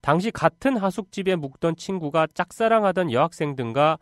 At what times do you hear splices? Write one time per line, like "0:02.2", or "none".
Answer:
0:01.9